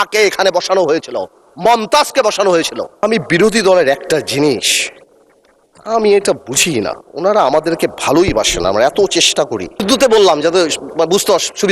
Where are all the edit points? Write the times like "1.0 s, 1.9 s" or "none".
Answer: 3.0 s, 9.8 s